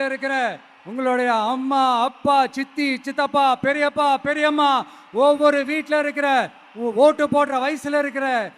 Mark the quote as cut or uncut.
uncut